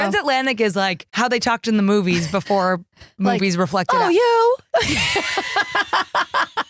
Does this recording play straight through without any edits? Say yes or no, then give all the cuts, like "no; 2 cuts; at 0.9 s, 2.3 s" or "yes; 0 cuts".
no; 1 cut; at 1.0 s